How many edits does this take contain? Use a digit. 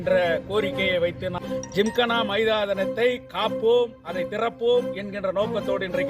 1